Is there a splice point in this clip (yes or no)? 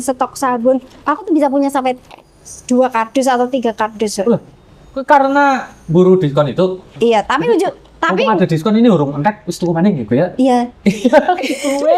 no